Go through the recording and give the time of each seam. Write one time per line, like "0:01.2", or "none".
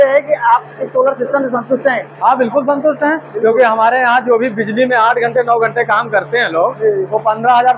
none